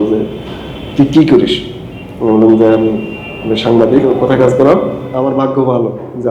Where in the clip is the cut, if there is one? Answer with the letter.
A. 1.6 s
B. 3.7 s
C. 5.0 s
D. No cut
C